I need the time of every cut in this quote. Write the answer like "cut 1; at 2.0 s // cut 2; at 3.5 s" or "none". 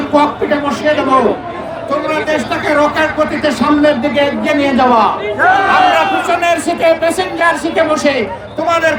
none